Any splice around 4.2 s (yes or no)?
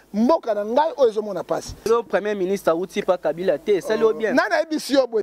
no